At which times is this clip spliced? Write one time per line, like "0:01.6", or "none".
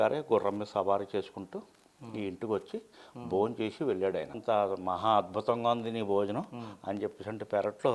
0:04.4